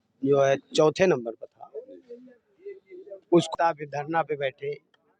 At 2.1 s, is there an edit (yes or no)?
no